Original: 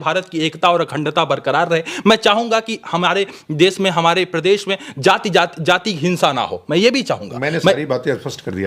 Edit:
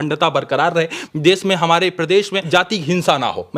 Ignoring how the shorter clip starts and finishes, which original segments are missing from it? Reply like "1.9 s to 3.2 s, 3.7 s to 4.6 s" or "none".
1.9 s to 3.3 s, 4.8 s to 5.6 s